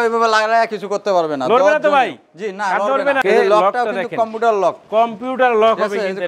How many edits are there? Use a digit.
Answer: 1